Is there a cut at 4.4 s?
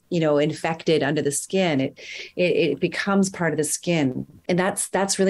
yes; 1 cut; at 4.4 s

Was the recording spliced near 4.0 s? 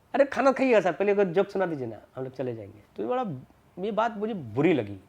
no; 1 cut; at 2.8 s

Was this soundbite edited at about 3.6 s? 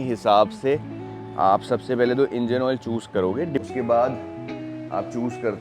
yes; 1 cut; at 3.6 s

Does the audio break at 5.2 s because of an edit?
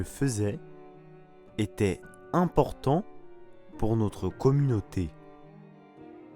yes; 1 cut; at 5.2 s

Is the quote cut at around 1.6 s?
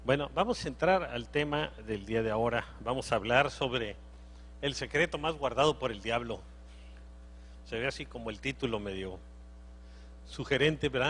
no; 1 cut; at 3.2 s

